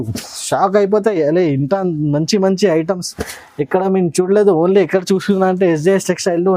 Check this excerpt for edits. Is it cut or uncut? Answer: uncut